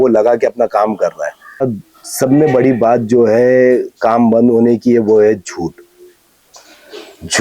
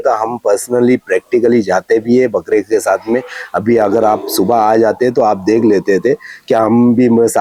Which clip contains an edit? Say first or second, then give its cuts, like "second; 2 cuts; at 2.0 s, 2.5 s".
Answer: first; 1 cut; at 1.7 s